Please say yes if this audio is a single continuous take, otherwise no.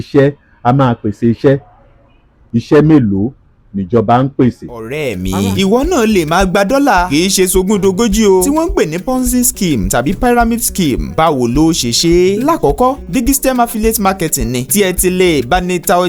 yes